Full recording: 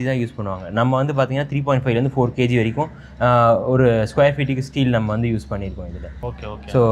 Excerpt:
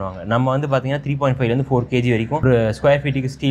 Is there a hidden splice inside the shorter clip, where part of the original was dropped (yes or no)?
yes